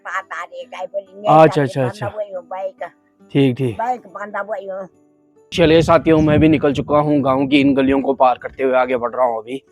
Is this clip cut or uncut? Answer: cut